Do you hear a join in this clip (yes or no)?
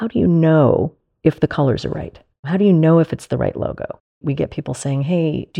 yes